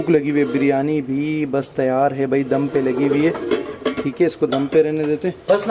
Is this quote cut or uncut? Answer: uncut